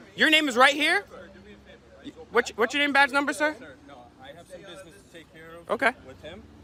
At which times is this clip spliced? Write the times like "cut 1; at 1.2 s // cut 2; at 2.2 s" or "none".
none